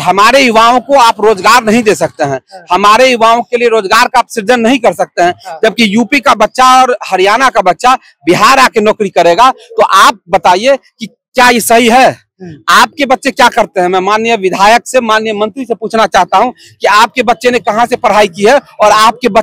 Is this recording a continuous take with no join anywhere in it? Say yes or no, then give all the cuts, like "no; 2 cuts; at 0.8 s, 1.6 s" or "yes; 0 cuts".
yes; 0 cuts